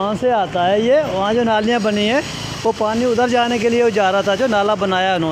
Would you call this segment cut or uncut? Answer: uncut